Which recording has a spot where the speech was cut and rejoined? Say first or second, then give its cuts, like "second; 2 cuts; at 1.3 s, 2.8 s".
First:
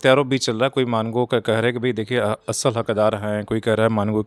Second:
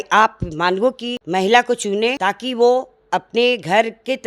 second; 2 cuts; at 1.1 s, 2.2 s